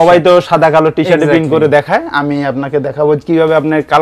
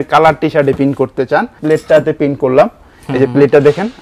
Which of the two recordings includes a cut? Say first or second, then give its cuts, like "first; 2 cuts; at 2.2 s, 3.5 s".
second; 1 cut; at 1.6 s